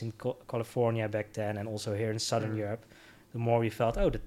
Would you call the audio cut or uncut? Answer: uncut